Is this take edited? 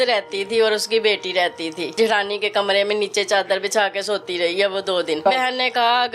yes; 2 cuts; at 1.9 s, 5.2 s

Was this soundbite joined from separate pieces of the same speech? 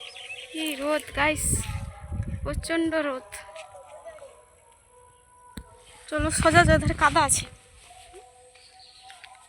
yes; 1 cut; at 5.9 s

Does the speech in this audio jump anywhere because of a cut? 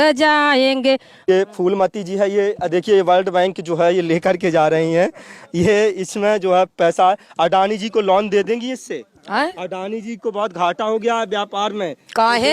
yes; 1 cut; at 1.2 s

